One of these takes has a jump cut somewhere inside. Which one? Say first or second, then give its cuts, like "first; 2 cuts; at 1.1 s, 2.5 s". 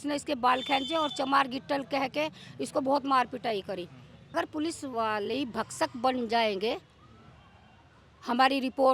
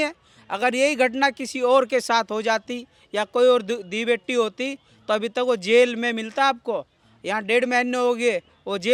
first; 1 cut; at 4.3 s